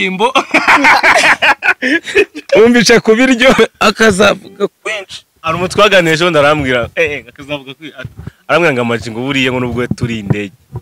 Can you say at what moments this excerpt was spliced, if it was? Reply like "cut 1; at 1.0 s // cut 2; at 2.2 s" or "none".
cut 1; at 3.6 s